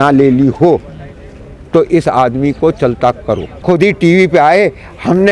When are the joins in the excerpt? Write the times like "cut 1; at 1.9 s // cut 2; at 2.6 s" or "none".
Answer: cut 1; at 3.5 s

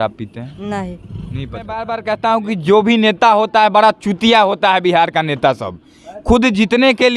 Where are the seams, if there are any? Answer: cut 1; at 1.9 s

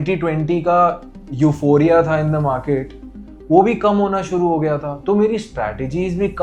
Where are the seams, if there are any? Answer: none

